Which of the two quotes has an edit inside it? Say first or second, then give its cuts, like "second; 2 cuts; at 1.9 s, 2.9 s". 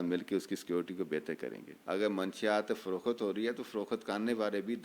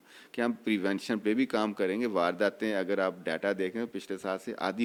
first; 1 cut; at 1.7 s